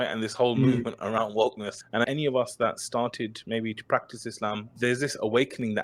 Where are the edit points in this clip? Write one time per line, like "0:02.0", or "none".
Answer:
0:02.0
0:04.8